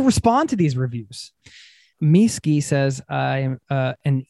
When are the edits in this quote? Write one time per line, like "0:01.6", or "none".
0:01.8